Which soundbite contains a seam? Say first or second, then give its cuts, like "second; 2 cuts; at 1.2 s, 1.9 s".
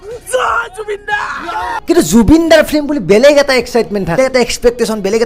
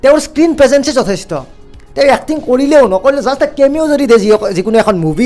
first; 2 cuts; at 1.7 s, 4.2 s